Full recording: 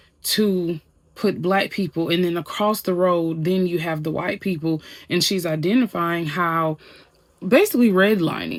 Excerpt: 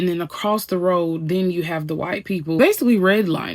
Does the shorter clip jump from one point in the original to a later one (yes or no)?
yes